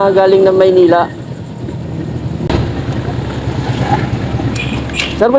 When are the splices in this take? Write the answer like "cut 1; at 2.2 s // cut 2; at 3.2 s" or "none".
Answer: cut 1; at 2.5 s